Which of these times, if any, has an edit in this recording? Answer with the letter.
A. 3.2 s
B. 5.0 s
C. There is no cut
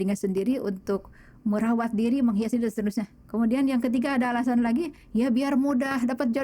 A